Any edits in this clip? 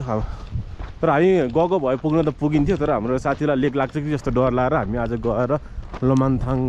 no; 0 cuts

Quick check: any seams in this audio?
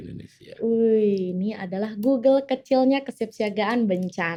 no; 0 cuts

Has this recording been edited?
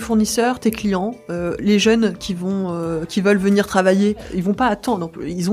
yes; 1 cut; at 4.3 s

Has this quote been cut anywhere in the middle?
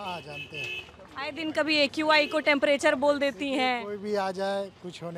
no; 0 cuts

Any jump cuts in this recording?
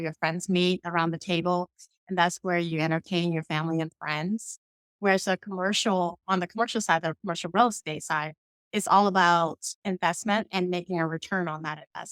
no; 0 cuts

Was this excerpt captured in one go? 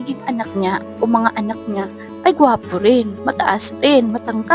yes; 0 cuts

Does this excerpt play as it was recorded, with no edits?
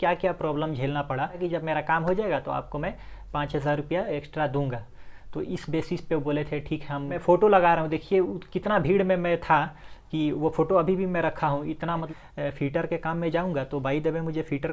no; 3 cuts; at 1.4 s, 7.2 s, 12.1 s

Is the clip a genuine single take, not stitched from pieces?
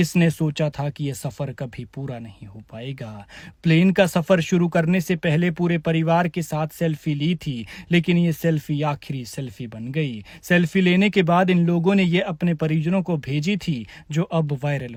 yes; 0 cuts

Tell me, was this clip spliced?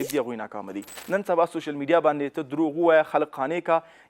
yes; 1 cut; at 1.0 s

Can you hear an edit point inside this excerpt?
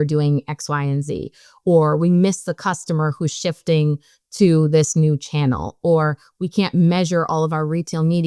no; 0 cuts

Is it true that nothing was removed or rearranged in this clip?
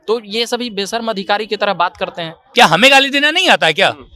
no; 1 cut; at 2.4 s

